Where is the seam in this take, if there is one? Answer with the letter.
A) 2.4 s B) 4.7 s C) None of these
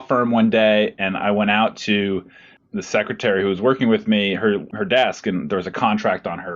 B